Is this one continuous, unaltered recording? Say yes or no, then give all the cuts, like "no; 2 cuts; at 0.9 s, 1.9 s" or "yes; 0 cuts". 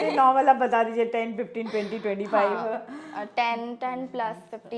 yes; 0 cuts